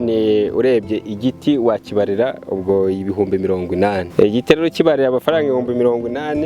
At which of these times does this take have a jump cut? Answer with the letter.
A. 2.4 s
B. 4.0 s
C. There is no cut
B